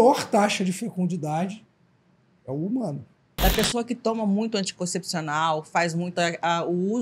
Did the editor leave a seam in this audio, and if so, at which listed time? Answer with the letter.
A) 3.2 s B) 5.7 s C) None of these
A